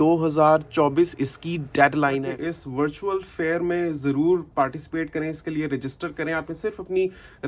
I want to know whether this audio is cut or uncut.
cut